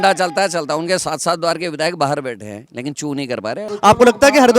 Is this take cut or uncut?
cut